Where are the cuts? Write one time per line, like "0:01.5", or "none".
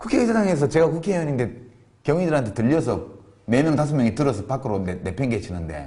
0:03.6

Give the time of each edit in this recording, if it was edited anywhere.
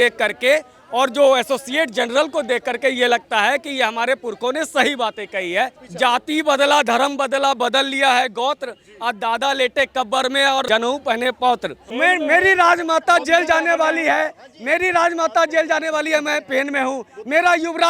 0:05.8
0:10.7
0:11.8

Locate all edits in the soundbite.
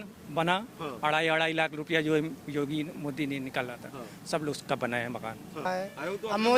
0:05.7

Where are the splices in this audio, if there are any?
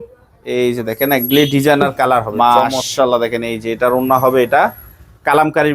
0:02.3

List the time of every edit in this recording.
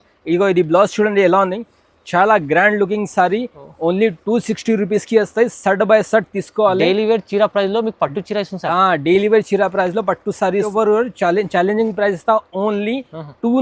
0:10.7

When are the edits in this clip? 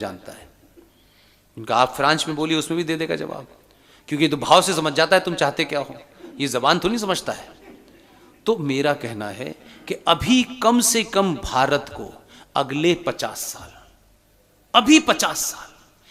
none

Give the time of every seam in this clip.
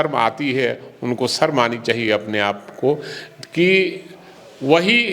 none

